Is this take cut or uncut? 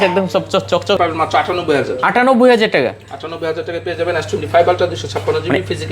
cut